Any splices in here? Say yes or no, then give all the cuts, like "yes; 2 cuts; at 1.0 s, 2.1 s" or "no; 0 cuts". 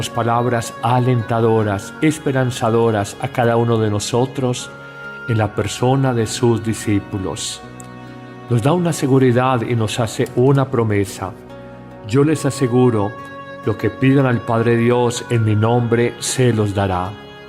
yes; 1 cut; at 16.2 s